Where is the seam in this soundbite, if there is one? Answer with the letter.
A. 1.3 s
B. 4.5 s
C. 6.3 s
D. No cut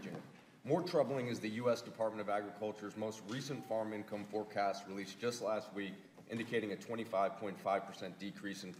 B